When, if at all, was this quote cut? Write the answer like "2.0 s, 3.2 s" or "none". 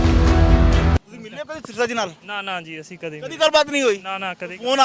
1.1 s

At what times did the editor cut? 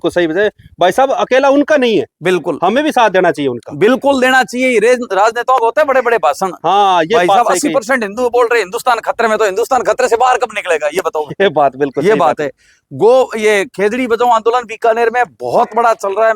none

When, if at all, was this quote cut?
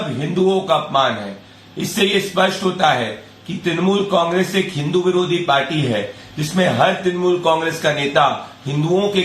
8.0 s

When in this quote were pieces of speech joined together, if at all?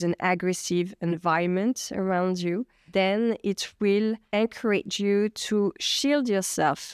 4.2 s

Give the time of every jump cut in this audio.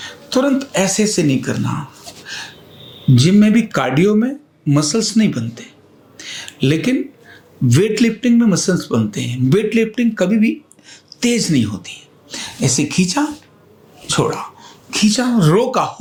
none

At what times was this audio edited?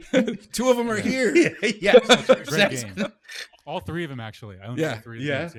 none

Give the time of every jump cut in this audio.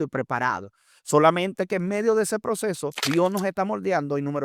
3.0 s

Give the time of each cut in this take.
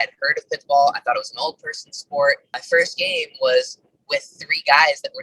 2.5 s

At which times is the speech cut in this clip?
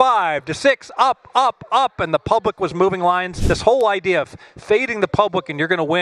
3.3 s

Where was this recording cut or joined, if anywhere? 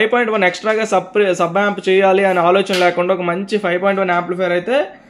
none

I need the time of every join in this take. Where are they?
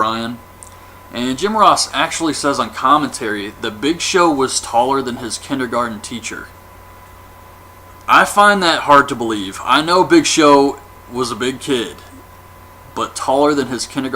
7.4 s

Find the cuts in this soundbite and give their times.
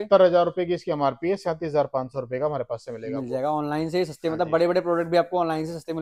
none

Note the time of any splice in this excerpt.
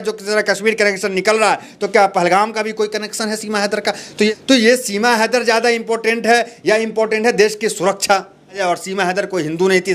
4.3 s, 8.6 s

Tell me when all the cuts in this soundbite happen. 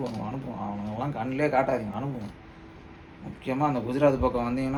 none

